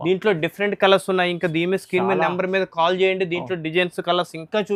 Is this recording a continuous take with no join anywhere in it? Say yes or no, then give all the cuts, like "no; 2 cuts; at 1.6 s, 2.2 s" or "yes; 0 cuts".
yes; 0 cuts